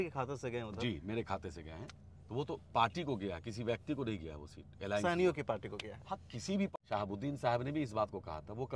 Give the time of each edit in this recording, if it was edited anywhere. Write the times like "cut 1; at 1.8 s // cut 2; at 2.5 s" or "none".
cut 1; at 6.7 s